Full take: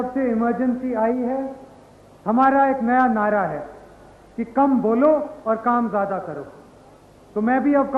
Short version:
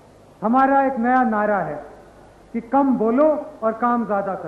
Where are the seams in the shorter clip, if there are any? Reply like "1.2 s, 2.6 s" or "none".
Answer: none

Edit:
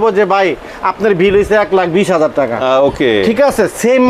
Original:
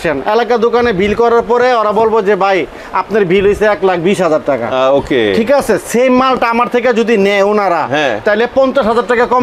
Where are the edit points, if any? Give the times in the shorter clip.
none

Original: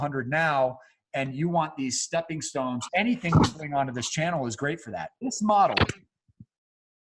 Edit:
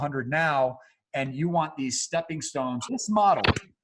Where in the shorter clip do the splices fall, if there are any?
2.8 s

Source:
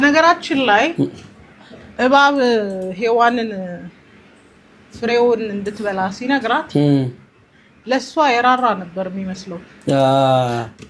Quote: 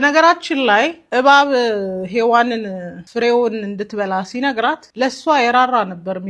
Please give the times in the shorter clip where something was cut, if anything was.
0.9 s, 3.0 s, 4.8 s

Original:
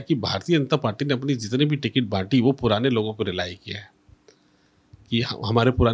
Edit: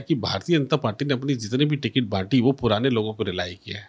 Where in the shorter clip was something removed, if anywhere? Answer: none

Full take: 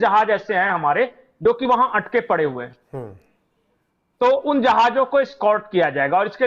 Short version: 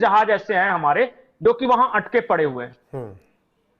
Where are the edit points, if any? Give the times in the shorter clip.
none

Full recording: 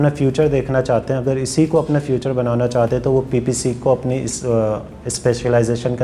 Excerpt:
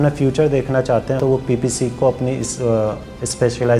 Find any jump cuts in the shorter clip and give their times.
1.2 s

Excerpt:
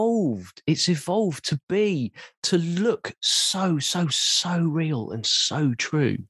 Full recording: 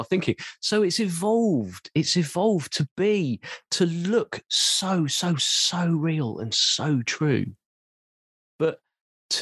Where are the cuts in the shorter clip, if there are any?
none

